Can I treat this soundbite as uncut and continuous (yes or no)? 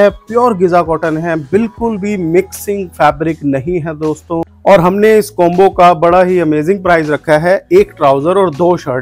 no